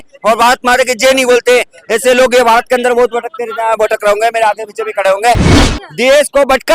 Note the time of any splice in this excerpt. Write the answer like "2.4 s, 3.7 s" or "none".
5.5 s